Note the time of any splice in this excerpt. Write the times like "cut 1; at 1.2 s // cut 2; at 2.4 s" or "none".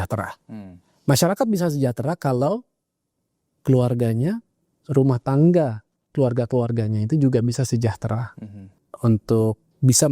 cut 1; at 8.8 s